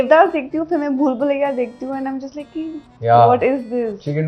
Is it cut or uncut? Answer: uncut